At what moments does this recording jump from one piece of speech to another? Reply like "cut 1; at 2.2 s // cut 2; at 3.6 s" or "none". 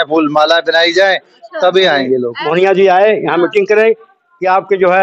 cut 1; at 2.3 s